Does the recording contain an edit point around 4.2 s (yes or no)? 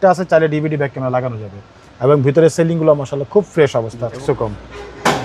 yes